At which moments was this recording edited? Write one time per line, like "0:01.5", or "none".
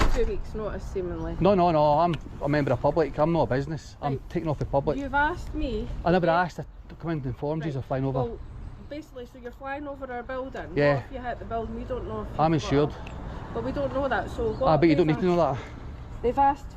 none